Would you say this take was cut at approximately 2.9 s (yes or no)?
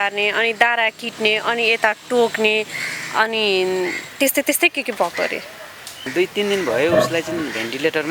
no